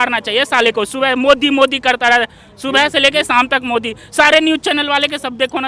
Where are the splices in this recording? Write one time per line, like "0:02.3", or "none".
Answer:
none